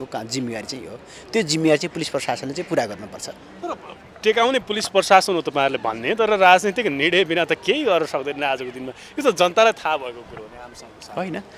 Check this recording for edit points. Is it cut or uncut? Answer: uncut